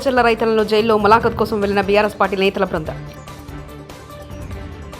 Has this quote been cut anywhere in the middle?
yes; 1 cut; at 2.9 s

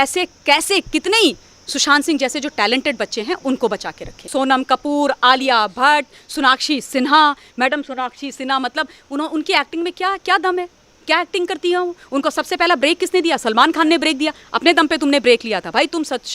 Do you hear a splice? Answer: yes; 1 cut; at 4.3 s

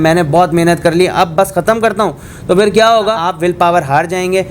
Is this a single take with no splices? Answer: no; 1 cut; at 3.2 s

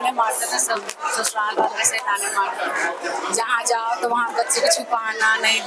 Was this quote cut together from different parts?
no; 0 cuts

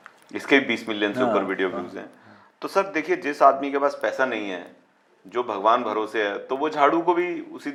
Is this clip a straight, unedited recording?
yes; 0 cuts

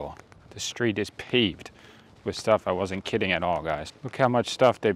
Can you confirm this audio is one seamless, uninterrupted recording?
no; 1 cut; at 4.0 s

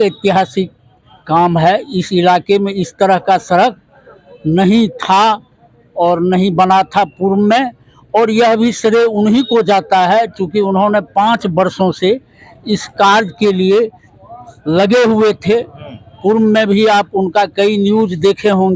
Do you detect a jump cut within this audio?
no; 0 cuts

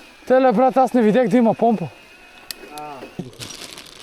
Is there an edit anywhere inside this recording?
yes; 1 cut; at 3.1 s

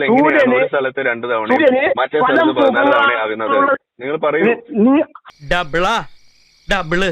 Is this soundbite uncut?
no; 1 cut; at 5.3 s

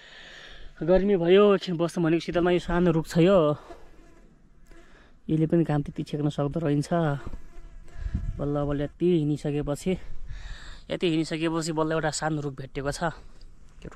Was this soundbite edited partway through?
no; 0 cuts

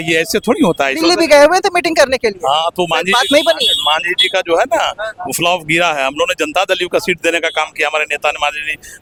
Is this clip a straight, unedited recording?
yes; 0 cuts

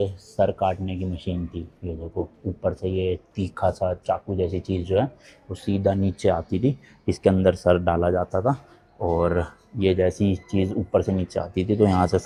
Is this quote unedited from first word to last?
yes; 0 cuts

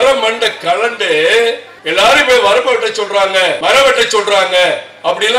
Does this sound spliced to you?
yes; 2 cuts; at 1.7 s, 3.6 s

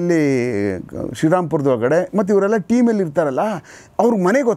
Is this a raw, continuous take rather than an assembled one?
yes; 0 cuts

